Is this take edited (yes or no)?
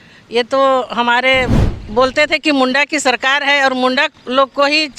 yes